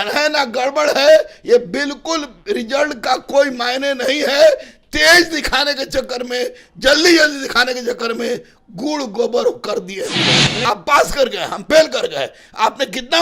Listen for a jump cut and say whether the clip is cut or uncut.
cut